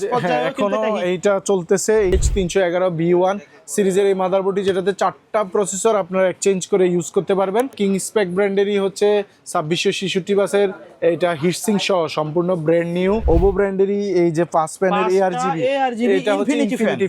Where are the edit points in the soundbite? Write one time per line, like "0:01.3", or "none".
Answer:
0:02.1
0:07.8
0:13.2